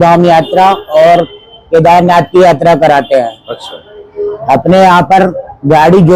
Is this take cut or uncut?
uncut